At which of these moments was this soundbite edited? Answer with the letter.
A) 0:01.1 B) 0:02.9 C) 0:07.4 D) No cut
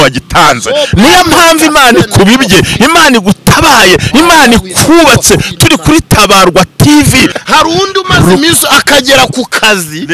C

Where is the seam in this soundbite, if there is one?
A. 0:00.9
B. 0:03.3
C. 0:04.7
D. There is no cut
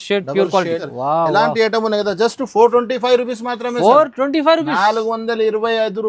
A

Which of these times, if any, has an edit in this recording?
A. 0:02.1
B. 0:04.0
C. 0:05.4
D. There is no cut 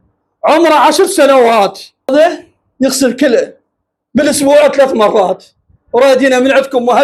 A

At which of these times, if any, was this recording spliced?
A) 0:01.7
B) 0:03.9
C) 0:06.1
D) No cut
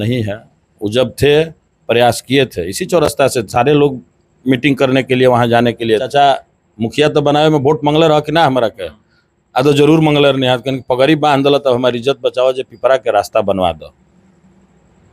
C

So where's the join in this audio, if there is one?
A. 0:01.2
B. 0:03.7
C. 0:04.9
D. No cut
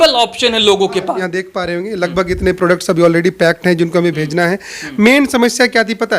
A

